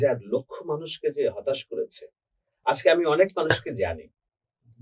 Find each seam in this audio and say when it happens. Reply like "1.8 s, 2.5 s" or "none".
none